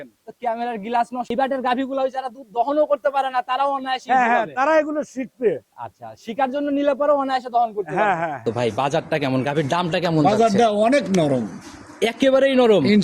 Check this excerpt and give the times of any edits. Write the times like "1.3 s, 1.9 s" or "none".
1.3 s, 8.4 s

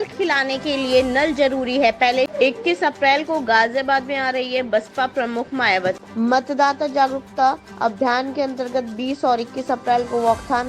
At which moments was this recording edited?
2.3 s, 6.0 s

